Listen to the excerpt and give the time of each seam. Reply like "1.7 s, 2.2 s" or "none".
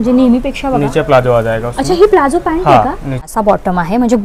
3.3 s